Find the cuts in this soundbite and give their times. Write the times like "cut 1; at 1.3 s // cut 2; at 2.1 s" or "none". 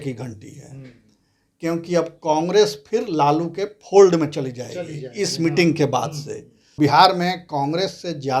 cut 1; at 6.7 s